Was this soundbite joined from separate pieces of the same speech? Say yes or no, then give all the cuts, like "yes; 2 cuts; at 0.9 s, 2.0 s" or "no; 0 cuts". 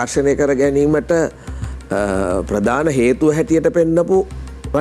no; 0 cuts